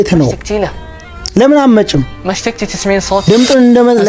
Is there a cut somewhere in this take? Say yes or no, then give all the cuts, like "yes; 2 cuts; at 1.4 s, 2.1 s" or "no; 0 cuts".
no; 0 cuts